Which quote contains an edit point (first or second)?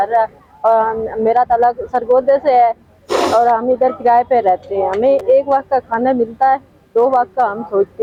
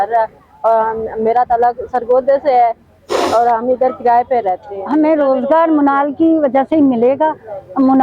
second